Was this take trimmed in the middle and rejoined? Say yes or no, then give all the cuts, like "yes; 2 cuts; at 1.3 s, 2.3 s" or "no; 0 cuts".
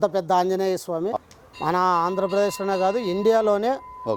yes; 1 cut; at 1.2 s